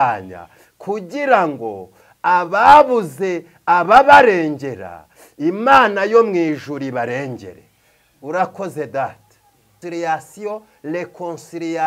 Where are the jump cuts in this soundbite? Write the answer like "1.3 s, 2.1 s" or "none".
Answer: 9.8 s